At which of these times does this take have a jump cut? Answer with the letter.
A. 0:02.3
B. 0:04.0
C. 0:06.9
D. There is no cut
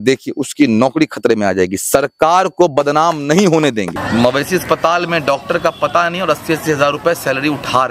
B